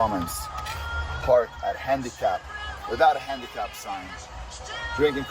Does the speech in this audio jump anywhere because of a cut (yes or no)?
no